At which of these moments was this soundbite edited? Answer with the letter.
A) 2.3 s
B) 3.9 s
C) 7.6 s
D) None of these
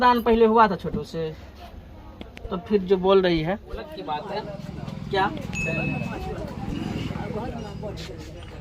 B